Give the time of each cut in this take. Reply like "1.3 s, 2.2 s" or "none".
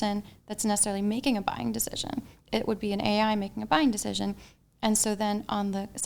none